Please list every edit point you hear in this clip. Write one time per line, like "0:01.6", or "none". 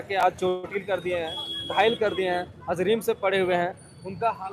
none